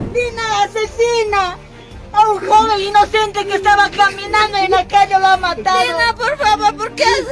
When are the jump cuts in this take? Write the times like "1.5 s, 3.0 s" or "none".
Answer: none